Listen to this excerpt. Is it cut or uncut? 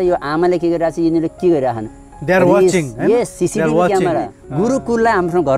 cut